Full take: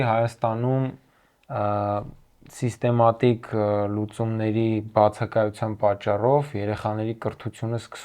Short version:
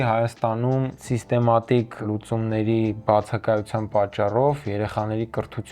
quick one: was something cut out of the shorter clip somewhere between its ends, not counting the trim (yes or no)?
yes